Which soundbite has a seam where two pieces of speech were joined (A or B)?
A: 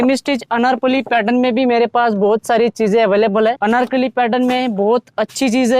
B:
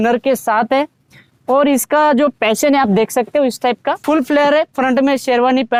A